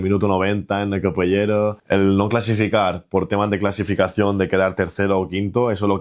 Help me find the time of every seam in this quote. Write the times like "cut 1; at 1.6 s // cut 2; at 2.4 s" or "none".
cut 1; at 1.8 s